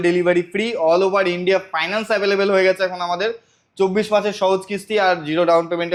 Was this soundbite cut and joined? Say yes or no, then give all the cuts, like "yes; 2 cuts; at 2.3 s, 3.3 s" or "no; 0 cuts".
no; 0 cuts